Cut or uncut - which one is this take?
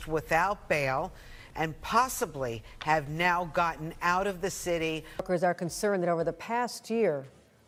uncut